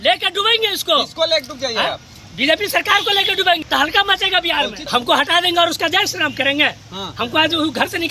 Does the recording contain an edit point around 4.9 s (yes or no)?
yes